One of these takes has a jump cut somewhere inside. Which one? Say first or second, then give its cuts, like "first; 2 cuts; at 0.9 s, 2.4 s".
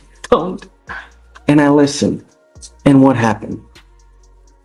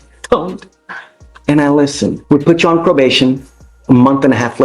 second; 1 cut; at 2.2 s